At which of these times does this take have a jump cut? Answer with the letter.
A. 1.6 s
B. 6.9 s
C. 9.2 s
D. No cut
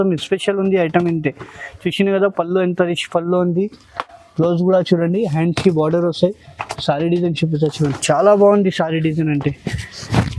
D